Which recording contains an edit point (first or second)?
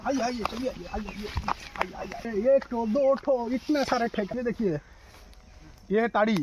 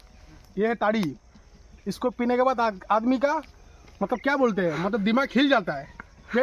first